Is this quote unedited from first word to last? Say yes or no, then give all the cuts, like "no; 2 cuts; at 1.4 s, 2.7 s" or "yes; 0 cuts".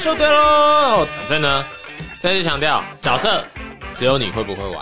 no; 1 cut; at 1.2 s